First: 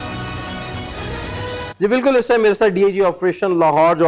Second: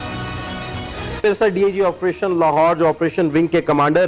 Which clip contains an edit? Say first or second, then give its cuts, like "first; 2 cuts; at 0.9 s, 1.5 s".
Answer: second; 1 cut; at 1.2 s